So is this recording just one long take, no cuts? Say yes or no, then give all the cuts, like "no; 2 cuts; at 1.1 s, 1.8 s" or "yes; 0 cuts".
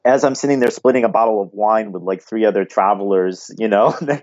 yes; 0 cuts